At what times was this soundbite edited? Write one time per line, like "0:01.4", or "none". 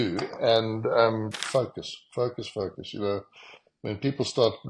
0:01.4